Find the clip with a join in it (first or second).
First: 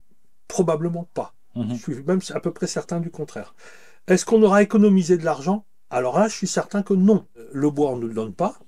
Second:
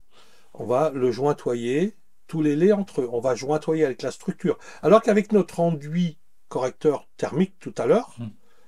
first